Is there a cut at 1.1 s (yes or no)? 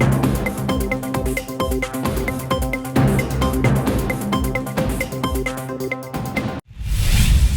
no